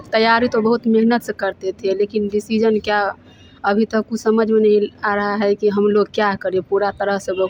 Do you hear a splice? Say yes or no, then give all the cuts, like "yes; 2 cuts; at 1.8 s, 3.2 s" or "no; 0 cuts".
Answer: no; 0 cuts